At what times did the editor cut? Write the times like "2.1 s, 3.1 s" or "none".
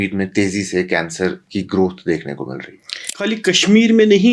3.1 s